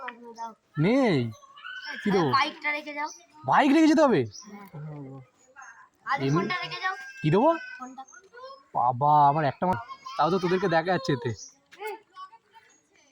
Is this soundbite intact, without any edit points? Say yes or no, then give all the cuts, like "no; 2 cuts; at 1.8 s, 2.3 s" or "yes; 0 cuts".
no; 1 cut; at 9.8 s